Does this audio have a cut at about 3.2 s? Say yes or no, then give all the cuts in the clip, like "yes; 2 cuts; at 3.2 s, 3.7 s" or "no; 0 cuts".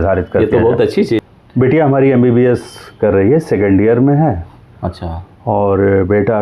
no; 1 cut; at 1.2 s